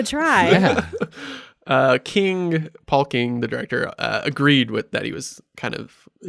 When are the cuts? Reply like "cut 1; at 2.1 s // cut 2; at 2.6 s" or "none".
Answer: none